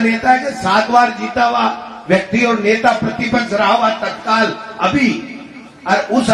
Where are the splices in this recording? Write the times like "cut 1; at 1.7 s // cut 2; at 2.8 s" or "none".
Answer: none